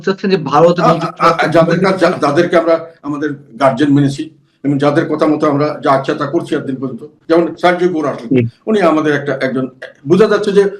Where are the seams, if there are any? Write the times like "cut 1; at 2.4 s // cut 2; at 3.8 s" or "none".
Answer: cut 1; at 7.1 s